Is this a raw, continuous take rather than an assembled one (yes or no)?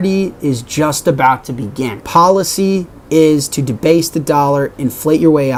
yes